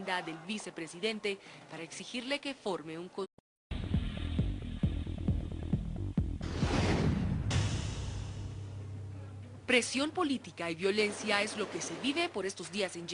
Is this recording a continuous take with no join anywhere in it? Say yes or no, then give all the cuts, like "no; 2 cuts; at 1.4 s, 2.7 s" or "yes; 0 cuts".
yes; 0 cuts